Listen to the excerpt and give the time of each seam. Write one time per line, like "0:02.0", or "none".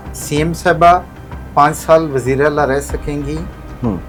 none